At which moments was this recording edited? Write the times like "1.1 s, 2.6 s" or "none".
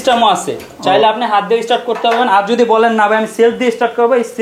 none